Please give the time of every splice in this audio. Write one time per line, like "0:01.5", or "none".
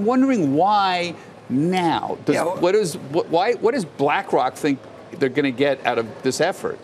none